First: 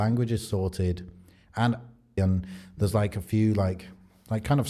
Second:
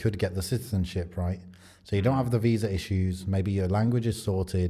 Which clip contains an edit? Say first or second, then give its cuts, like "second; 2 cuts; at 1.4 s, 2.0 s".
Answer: first; 1 cut; at 2.2 s